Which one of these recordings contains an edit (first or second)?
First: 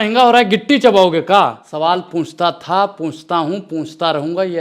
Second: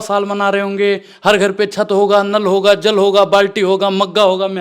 first